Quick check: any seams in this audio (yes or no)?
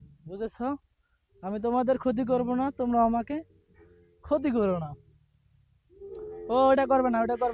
no